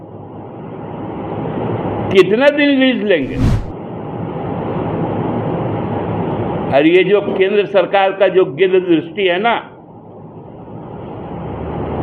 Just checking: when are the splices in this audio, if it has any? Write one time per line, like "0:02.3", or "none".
0:03.5

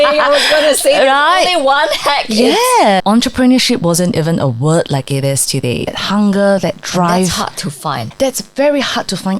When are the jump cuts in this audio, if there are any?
0:03.0
0:06.0
0:08.0

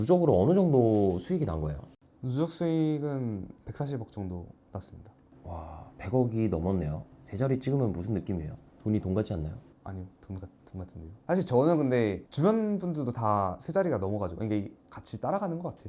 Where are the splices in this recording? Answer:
0:11.1

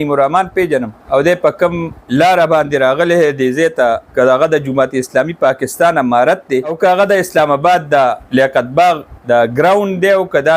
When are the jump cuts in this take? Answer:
0:01.0
0:02.0
0:04.1
0:06.7
0:08.2
0:09.1

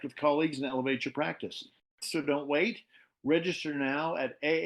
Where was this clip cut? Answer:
0:02.0

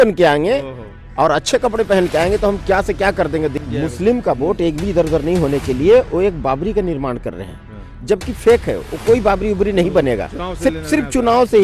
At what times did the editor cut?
0:03.6

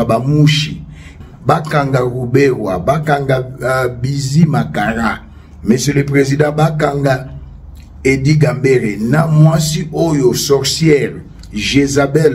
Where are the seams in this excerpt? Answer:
0:01.2

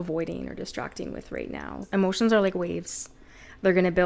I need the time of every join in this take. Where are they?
0:01.8

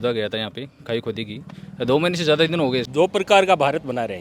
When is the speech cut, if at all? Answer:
0:02.9

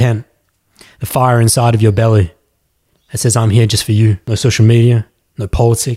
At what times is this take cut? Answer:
0:04.2

